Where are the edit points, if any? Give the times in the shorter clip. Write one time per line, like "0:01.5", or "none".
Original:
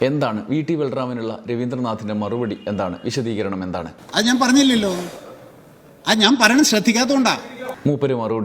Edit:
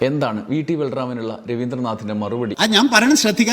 0:02.5